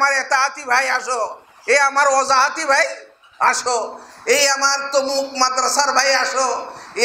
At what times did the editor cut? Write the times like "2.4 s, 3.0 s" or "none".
none